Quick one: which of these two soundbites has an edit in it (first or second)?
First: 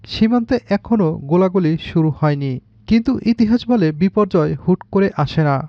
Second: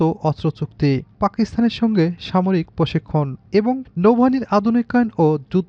second